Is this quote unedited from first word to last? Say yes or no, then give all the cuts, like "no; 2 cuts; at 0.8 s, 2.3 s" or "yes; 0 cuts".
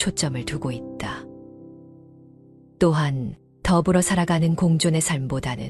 no; 2 cuts; at 1.1 s, 2.7 s